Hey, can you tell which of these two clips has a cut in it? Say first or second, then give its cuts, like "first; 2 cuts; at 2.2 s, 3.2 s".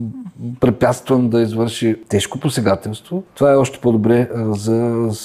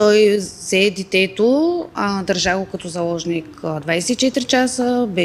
first; 2 cuts; at 2.0 s, 3.3 s